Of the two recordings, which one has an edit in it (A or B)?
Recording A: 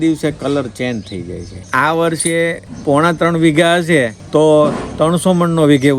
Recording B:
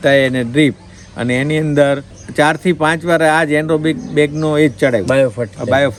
A